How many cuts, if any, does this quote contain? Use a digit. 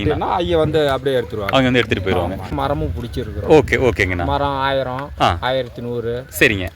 1